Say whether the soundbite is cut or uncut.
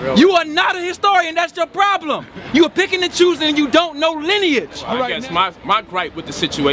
cut